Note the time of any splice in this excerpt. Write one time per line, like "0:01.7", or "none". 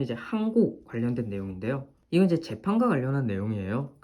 0:01.9